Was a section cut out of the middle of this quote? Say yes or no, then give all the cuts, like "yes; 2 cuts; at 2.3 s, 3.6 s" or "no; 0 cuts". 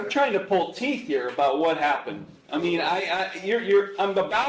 no; 0 cuts